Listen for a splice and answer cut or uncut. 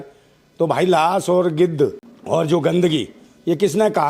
cut